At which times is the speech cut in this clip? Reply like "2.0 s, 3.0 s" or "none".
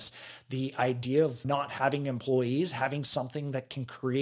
1.4 s

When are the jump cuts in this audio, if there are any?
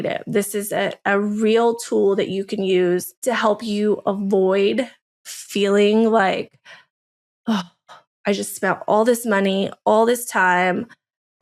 none

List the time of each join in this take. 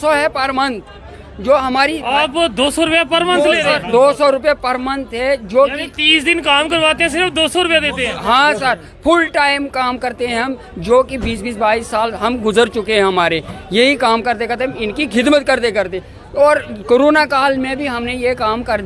none

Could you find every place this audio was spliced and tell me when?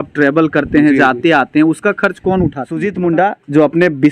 2.9 s

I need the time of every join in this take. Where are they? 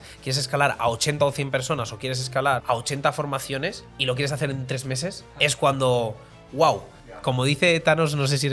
2.6 s, 3.9 s, 5.3 s, 7.2 s

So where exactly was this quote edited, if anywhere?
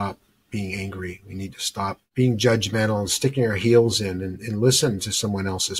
2.0 s

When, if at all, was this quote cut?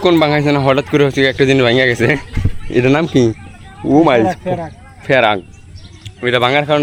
none

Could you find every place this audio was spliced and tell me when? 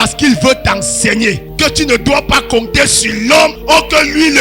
1.5 s, 3.6 s

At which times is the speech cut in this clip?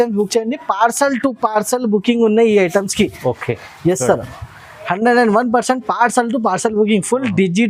none

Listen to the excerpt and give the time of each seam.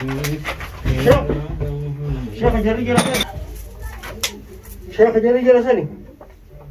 3.2 s

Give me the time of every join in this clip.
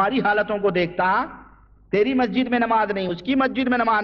none

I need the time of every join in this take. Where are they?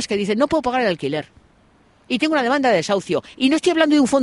none

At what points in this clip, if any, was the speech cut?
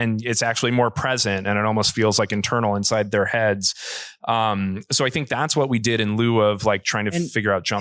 none

